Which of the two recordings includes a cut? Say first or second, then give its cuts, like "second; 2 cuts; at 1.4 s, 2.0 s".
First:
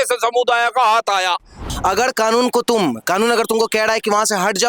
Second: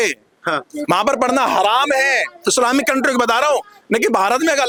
first; 1 cut; at 1.7 s